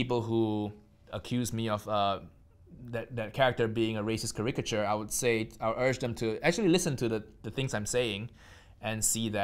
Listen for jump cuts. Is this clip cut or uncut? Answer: uncut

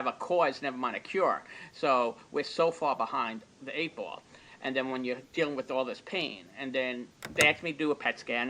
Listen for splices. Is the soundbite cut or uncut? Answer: cut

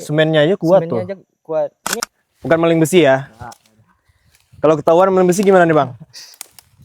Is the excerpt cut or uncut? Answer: cut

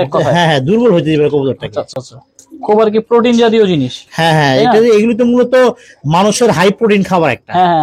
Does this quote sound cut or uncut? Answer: uncut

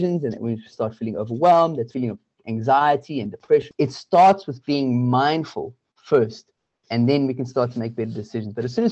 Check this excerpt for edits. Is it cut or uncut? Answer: cut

